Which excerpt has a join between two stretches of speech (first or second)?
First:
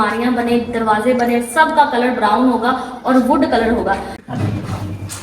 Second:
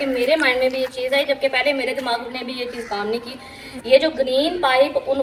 first